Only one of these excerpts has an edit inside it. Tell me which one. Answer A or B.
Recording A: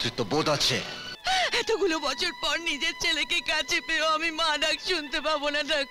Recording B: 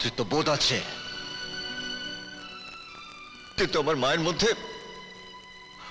A